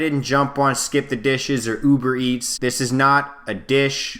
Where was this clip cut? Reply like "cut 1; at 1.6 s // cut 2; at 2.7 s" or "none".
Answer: cut 1; at 2.5 s